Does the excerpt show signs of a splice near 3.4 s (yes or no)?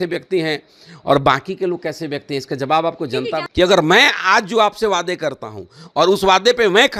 yes